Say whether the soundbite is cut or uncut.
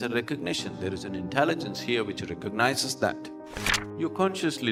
uncut